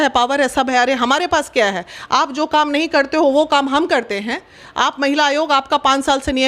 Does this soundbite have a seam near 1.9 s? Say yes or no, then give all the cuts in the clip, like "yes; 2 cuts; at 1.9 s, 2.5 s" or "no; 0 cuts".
no; 0 cuts